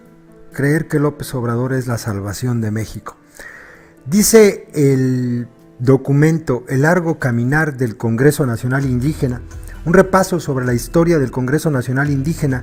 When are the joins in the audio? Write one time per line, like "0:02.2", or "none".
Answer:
none